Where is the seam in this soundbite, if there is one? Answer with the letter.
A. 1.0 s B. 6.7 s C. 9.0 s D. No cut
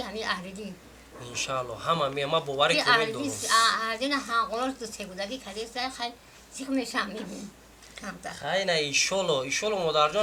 D